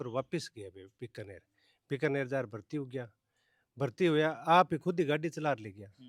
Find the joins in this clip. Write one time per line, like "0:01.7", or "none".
none